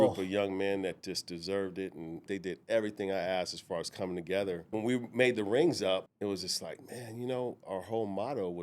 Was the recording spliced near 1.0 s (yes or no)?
no